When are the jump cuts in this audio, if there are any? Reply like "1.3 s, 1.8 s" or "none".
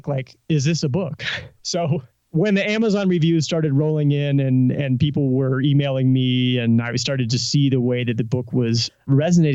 1.9 s